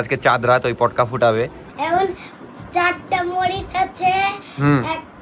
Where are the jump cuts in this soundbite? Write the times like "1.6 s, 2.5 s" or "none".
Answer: 1.7 s